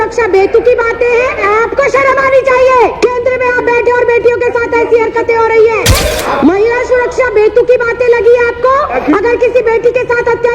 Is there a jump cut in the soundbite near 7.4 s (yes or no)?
no